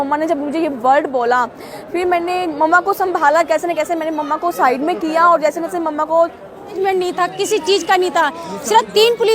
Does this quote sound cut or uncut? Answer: cut